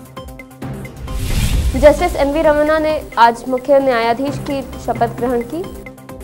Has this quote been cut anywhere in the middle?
yes; 2 cuts; at 0.7 s, 1.5 s

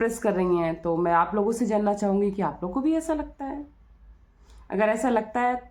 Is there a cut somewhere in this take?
no; 0 cuts

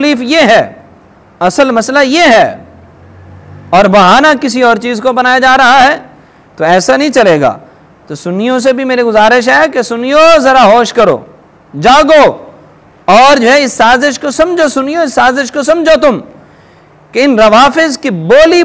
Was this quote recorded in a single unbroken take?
yes; 0 cuts

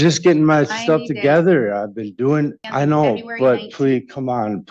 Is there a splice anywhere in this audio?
yes; 1 cut; at 2.6 s

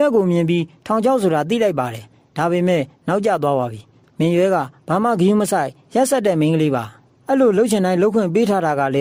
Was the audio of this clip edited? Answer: no; 0 cuts

